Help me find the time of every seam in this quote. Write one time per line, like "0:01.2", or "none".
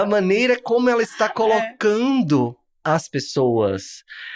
none

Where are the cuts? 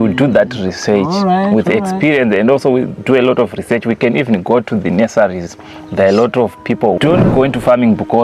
0:07.0

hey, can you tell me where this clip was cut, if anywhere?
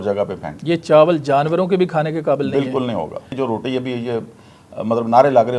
0:03.3

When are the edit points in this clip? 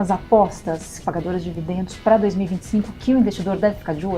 0:01.0

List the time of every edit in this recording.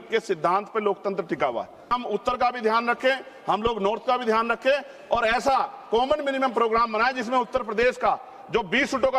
0:01.9

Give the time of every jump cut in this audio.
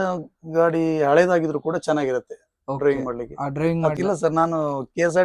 0:03.9

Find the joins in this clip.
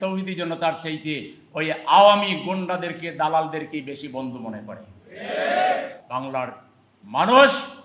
0:05.9

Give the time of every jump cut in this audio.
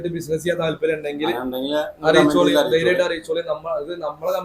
none

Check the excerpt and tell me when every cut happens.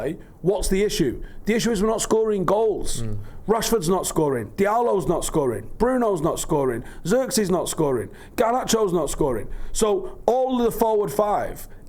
none

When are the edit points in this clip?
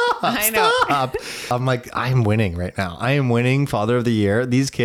0:01.4

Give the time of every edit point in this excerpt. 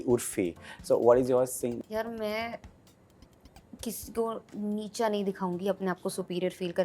0:01.8

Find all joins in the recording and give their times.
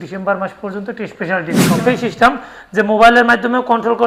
0:01.8

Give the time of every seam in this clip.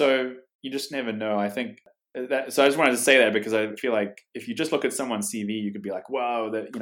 0:02.0

